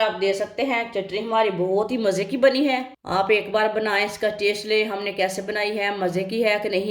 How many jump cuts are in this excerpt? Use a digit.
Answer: 1